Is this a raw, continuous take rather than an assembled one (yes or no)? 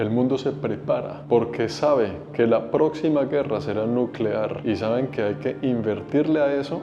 yes